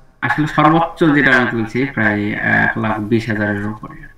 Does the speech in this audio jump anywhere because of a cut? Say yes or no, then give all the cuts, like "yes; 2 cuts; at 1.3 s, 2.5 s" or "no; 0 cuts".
no; 0 cuts